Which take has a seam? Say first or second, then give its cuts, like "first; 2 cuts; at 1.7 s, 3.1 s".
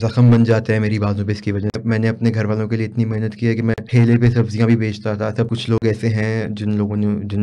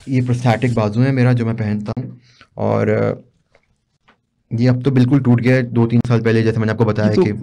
first; 3 cuts; at 1.8 s, 3.8 s, 5.5 s